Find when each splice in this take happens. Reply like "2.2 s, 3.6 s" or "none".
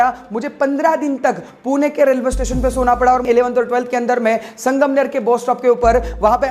3.2 s